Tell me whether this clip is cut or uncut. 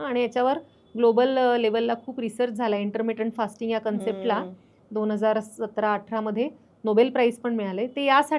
uncut